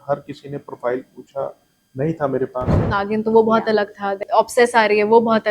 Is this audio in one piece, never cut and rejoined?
no; 2 cuts; at 3.0 s, 4.2 s

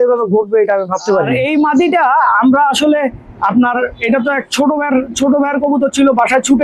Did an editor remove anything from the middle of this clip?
yes; 1 cut; at 1.3 s

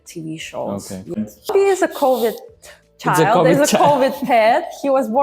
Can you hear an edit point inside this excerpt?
yes; 1 cut; at 1.5 s

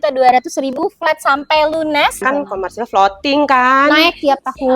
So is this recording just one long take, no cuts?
no; 1 cut; at 2.2 s

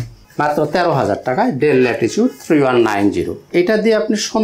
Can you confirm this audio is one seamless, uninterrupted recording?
no; 1 cut; at 3.4 s

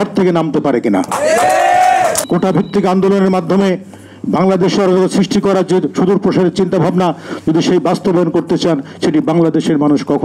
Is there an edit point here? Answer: yes; 1 cut; at 2.2 s

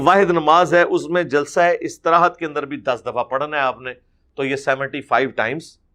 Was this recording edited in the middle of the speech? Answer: no; 0 cuts

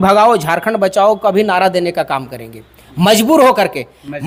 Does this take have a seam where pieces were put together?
no; 0 cuts

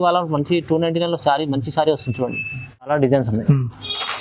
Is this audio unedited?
no; 1 cut; at 2.9 s

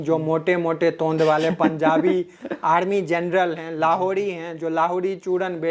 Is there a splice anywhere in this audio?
no; 0 cuts

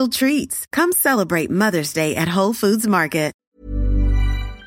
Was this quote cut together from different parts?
yes; 1 cut; at 3.4 s

